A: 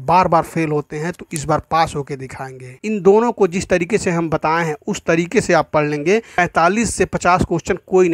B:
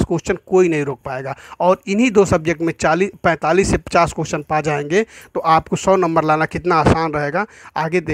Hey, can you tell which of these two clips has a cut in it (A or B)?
A